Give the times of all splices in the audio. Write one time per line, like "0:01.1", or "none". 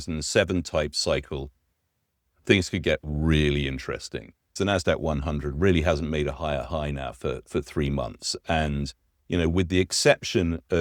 0:04.5